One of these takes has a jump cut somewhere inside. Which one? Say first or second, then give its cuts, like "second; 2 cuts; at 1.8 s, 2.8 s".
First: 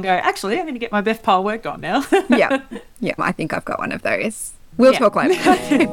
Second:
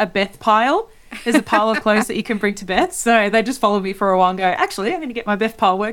first; 1 cut; at 3.2 s